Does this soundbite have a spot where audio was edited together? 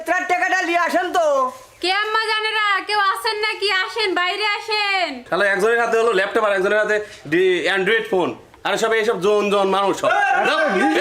yes; 1 cut; at 5.2 s

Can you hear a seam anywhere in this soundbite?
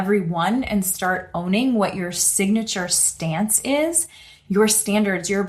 no; 0 cuts

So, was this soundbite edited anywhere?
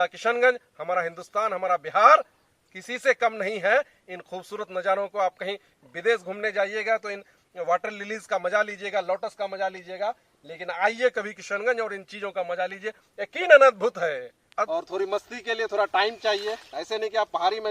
yes; 1 cut; at 14.7 s

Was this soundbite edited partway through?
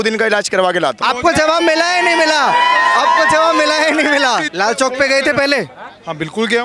yes; 2 cuts; at 1.0 s, 4.5 s

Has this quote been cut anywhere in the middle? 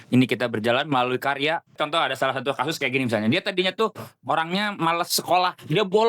yes; 1 cut; at 1.7 s

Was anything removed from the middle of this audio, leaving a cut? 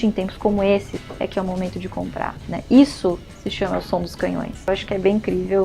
yes; 2 cuts; at 1.0 s, 4.6 s

